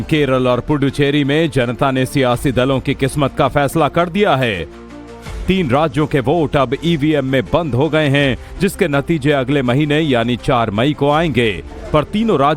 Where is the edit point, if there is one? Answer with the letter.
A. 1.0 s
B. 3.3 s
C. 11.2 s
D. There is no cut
B